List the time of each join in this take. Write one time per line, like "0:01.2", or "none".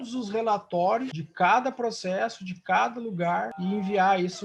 0:01.2
0:03.5